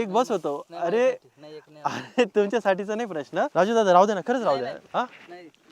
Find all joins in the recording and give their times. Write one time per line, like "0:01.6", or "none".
0:03.5